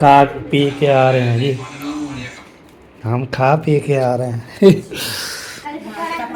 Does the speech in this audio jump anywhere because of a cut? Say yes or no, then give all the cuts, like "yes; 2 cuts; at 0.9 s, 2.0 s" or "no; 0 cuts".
no; 0 cuts